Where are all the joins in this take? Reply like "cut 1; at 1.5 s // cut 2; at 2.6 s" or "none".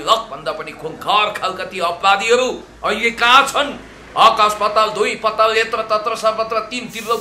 none